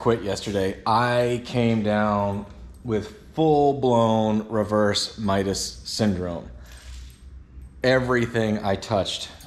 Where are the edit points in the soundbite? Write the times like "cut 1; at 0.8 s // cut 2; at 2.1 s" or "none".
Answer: none